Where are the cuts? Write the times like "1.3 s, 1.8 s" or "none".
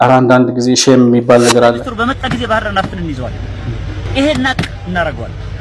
1.9 s